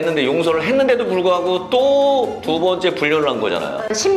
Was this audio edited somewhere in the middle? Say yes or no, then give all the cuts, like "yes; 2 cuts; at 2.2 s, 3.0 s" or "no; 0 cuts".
no; 0 cuts